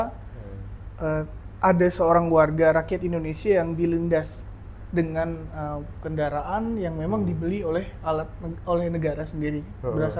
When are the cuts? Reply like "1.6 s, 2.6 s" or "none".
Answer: none